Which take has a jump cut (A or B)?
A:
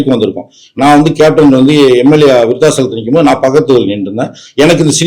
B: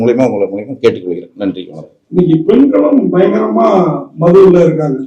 B